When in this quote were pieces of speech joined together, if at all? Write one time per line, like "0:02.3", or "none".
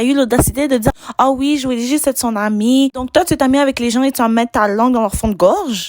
0:00.9
0:03.1